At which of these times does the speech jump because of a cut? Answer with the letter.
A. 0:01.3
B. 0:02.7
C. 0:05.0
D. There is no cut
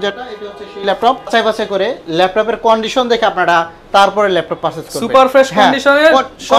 A